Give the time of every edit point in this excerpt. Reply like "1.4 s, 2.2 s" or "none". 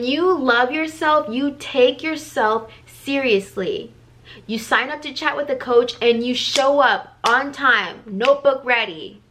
none